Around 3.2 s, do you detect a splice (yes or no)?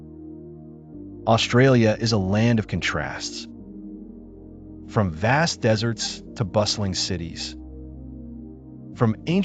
yes